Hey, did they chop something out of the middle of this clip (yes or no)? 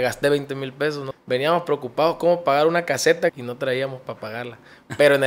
yes